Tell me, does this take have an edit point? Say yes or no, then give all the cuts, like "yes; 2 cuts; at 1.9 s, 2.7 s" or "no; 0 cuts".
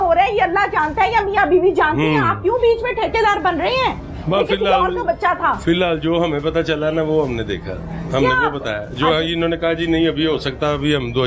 no; 0 cuts